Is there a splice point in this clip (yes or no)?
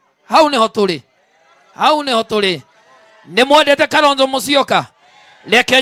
no